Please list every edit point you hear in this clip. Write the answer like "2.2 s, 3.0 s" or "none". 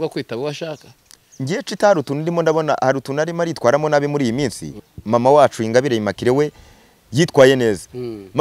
4.8 s